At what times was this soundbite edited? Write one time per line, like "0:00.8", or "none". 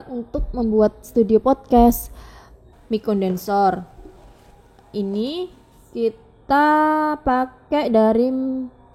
0:02.7